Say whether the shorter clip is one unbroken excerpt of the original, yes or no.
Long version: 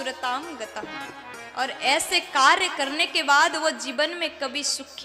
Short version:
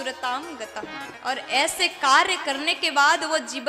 no